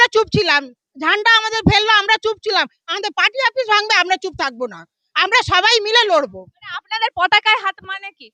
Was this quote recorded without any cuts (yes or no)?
yes